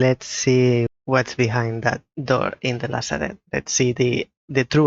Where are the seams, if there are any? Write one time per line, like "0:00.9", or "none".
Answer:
0:00.9
0:02.1
0:03.4